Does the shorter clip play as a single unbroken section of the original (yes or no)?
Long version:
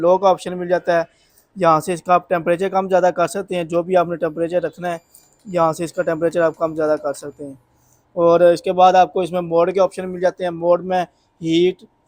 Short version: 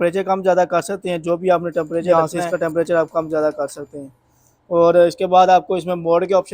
no